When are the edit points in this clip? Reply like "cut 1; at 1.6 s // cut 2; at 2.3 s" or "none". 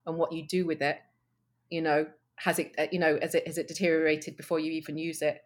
none

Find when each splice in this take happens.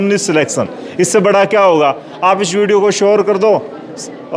none

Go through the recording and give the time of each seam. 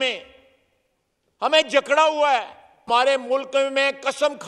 cut 1; at 2.9 s

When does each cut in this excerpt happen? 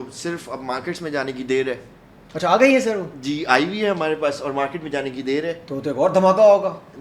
none

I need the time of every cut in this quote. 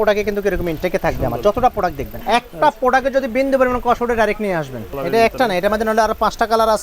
cut 1; at 2.1 s // cut 2; at 4.9 s

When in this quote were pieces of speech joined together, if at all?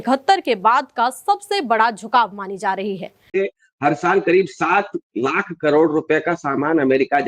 cut 1; at 3.4 s

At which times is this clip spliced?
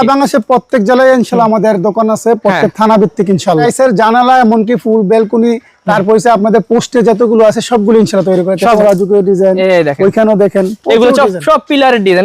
cut 1; at 3.7 s // cut 2; at 8.7 s

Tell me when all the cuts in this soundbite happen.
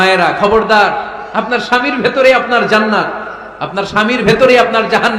none

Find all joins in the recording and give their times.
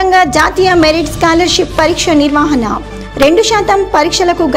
none

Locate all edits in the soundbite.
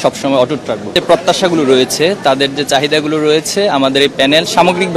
cut 1; at 1.0 s

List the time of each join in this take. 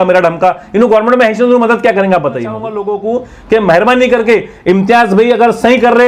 cut 1; at 2.8 s

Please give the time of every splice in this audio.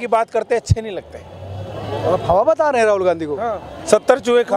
none

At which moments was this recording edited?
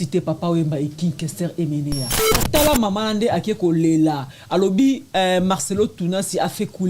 cut 1; at 2.3 s

